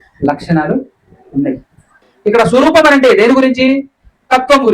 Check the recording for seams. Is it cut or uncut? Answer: cut